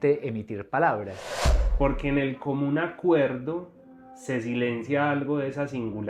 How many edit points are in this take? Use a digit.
1